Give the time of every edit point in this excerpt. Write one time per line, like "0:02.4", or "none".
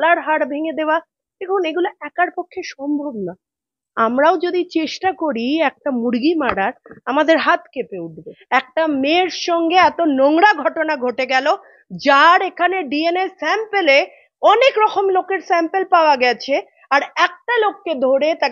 0:08.3